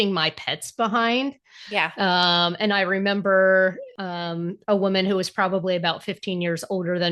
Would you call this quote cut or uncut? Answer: cut